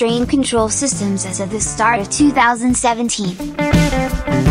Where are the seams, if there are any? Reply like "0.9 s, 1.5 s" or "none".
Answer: 3.4 s